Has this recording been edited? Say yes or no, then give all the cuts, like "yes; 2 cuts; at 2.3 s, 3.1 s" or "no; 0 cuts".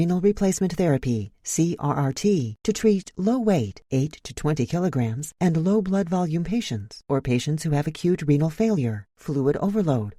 no; 0 cuts